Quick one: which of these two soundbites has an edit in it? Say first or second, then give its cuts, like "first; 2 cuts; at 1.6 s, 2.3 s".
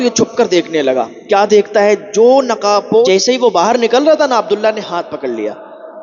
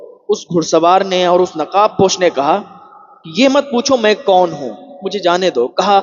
first; 1 cut; at 3.1 s